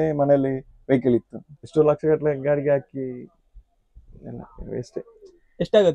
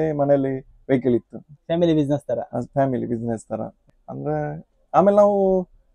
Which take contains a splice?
first; 1 cut; at 1.6 s

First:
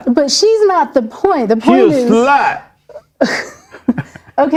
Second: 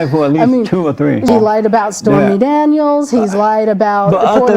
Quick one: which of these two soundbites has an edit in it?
second; 1 cut; at 1.3 s

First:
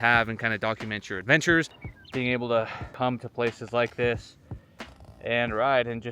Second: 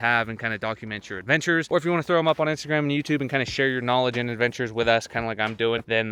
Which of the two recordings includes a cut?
first; 2 cuts; at 1.7 s, 2.8 s

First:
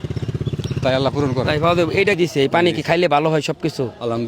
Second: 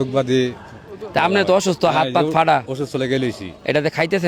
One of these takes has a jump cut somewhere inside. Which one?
first; 1 cut; at 2.2 s

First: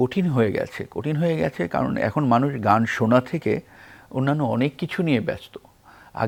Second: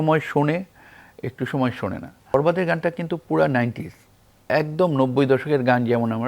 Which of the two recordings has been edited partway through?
second; 1 cut; at 2.3 s

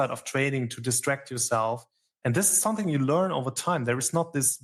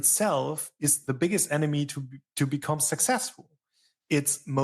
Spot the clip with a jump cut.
second; 1 cut; at 1.0 s

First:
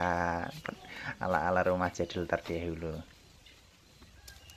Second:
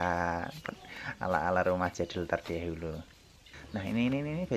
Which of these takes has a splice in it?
second; 1 cut; at 3.5 s

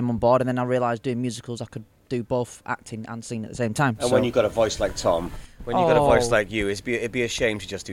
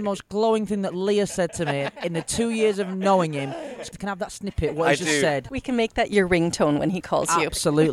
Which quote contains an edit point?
second; 2 cuts; at 3.9 s, 5.5 s

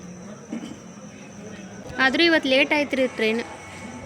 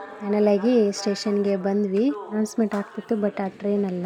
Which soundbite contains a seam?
first; 1 cut; at 1.8 s

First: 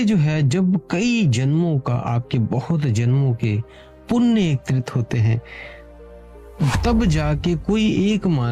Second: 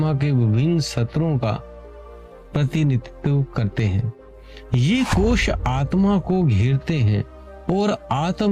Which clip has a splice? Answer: second; 1 cut; at 1.3 s

